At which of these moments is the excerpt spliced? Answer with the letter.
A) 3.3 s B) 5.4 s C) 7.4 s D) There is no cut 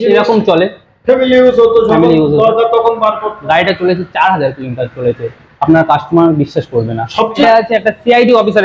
C